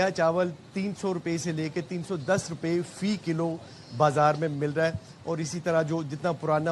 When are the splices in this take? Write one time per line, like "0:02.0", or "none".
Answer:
none